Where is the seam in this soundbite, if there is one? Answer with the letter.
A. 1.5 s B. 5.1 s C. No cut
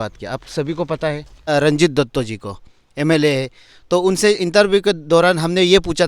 A